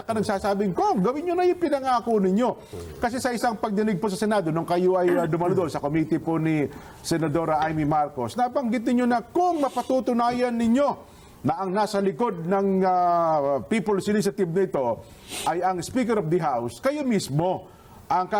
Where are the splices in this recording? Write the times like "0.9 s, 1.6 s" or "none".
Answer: none

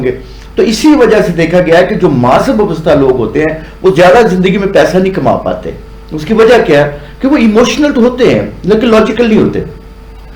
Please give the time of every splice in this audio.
none

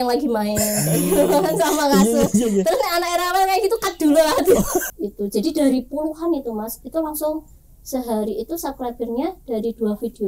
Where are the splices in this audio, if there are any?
4.9 s

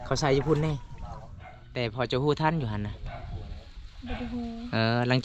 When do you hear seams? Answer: none

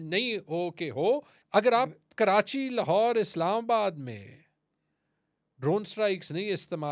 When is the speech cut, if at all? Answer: 1.3 s

